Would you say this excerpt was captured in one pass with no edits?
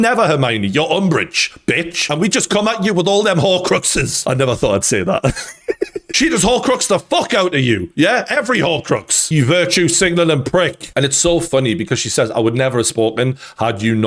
yes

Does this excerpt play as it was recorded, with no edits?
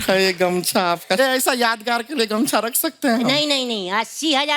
no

